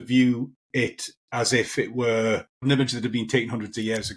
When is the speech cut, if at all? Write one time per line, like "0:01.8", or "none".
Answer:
0:02.6